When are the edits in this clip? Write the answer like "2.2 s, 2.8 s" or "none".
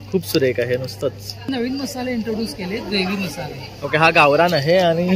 1.5 s